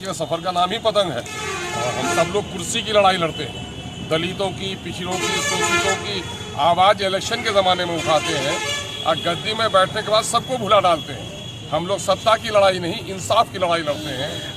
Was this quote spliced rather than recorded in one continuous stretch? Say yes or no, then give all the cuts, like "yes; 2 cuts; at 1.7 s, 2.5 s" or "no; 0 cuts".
yes; 1 cut; at 2.0 s